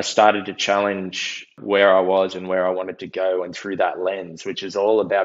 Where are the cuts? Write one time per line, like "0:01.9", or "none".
0:01.6